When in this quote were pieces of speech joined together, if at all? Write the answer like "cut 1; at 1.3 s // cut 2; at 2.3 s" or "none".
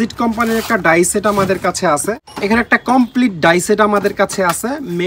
cut 1; at 2.3 s